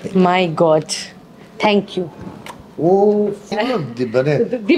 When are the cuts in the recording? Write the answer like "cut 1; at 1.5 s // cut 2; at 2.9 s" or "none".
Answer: cut 1; at 3.5 s